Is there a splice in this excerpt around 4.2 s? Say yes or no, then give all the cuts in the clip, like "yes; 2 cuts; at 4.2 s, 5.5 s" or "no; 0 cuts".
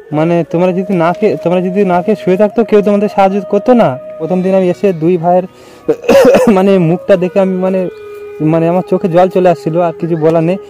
yes; 1 cut; at 4.2 s